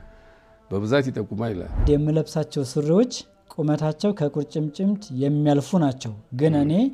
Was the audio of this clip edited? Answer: yes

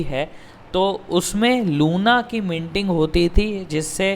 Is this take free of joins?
yes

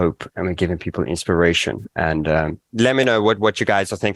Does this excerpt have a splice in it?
yes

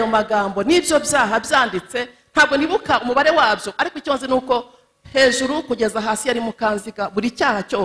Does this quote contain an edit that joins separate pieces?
no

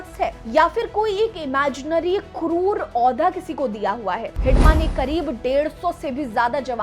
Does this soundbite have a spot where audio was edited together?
yes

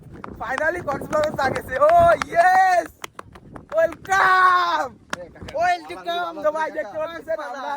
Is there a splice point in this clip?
no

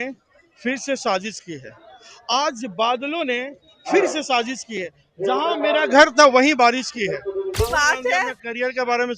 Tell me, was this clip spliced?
yes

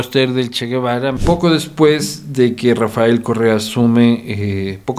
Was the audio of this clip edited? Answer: yes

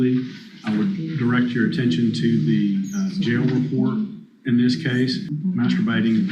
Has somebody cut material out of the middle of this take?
yes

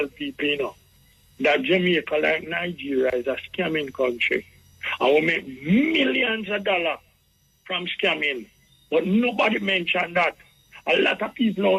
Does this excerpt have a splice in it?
no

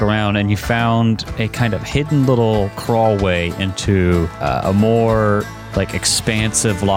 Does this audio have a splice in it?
yes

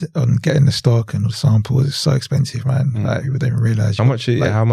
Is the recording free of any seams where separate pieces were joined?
yes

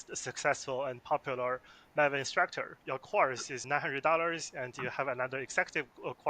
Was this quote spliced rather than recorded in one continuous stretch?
yes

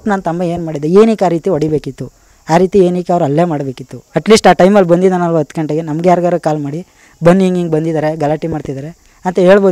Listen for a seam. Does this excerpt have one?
no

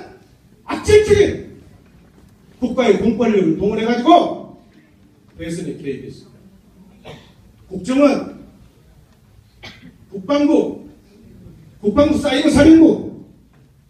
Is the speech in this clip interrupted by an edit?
no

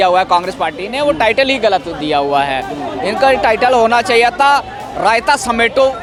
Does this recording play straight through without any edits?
yes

